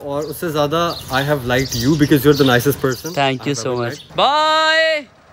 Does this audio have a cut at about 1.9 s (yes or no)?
no